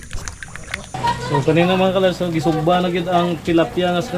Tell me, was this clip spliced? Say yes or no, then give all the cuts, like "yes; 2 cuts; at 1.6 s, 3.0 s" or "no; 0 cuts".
yes; 1 cut; at 0.9 s